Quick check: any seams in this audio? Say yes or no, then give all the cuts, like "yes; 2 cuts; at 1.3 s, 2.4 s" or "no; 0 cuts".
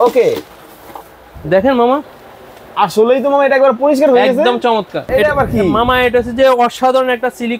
yes; 1 cut; at 5.0 s